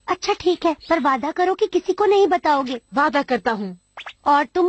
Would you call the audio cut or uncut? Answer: cut